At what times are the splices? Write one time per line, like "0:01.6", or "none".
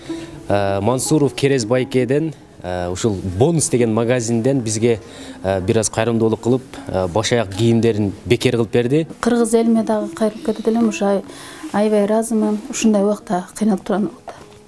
0:09.1